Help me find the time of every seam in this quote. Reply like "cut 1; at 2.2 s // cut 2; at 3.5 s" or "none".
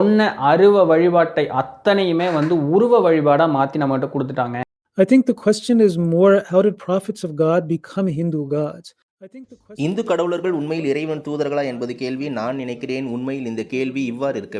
cut 1; at 4.7 s